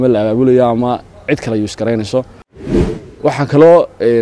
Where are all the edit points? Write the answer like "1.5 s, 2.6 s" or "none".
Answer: 2.9 s